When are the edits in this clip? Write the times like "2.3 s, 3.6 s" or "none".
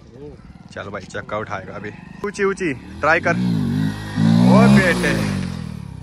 2.2 s

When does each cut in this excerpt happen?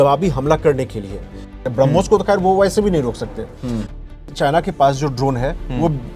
1.6 s, 4.0 s

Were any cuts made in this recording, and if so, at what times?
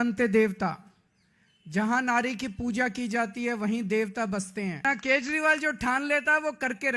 4.8 s

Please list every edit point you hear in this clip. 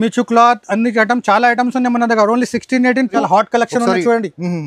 3.2 s

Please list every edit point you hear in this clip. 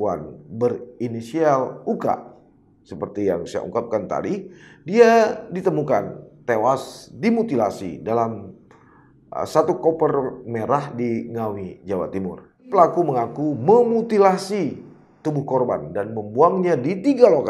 12.7 s

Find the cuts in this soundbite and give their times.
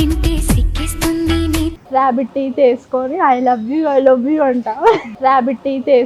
1.8 s, 5.1 s

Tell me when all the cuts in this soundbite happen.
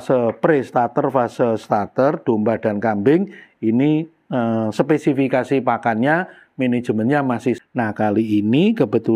7.6 s

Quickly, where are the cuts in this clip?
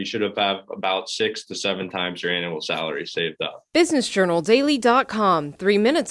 3.6 s

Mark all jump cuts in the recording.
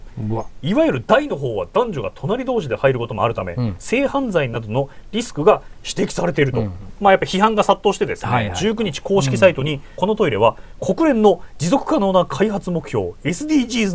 6.9 s, 9.9 s

